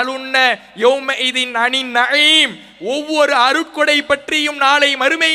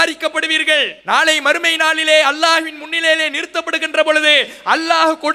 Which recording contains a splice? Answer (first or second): second